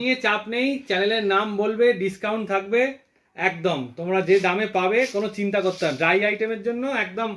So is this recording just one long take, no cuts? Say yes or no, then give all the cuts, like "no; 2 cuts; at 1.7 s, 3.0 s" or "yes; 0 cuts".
yes; 0 cuts